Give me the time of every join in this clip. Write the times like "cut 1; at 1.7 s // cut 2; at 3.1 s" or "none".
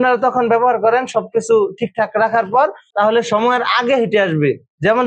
none